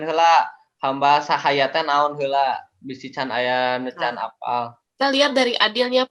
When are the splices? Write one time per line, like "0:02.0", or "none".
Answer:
0:04.8